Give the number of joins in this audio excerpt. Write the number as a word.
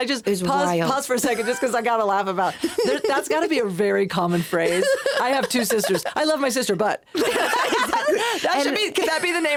zero